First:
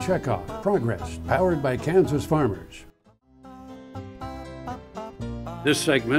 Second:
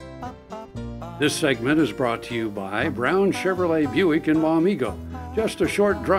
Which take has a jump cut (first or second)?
first